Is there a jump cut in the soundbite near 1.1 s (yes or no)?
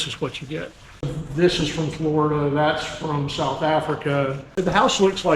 yes